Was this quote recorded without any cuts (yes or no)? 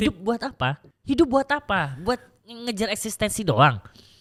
yes